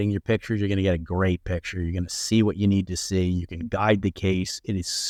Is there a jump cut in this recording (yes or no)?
no